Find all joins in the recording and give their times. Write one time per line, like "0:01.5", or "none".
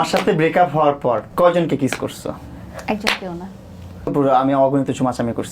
0:01.3
0:04.1